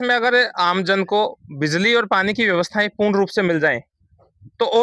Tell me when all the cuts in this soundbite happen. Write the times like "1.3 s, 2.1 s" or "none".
none